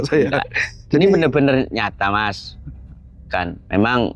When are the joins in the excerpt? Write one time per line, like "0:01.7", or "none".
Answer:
none